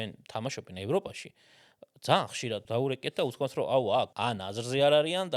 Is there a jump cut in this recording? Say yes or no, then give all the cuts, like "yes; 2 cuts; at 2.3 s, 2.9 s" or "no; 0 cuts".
yes; 2 cuts; at 2.6 s, 4.1 s